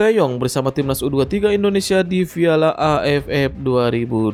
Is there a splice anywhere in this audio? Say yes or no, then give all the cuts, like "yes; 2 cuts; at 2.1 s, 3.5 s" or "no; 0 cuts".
no; 0 cuts